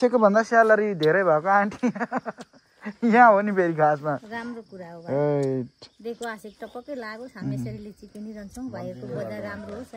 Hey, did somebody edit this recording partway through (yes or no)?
no